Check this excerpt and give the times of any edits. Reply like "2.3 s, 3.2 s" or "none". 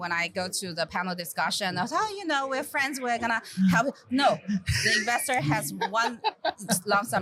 none